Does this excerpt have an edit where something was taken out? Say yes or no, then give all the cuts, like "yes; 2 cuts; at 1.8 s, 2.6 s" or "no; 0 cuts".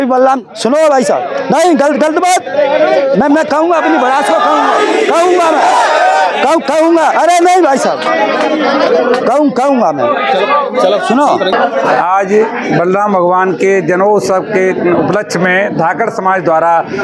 no; 0 cuts